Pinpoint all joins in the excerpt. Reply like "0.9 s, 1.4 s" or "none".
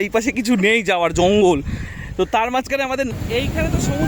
3.1 s